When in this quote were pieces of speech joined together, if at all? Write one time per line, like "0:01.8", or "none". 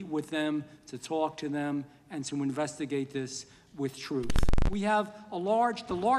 0:04.5